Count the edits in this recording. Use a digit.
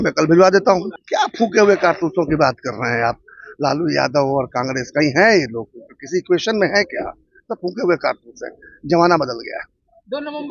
1